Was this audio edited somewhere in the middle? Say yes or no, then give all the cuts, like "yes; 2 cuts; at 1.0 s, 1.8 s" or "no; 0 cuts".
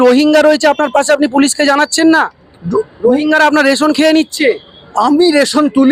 no; 0 cuts